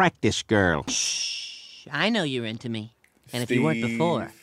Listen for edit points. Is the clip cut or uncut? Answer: cut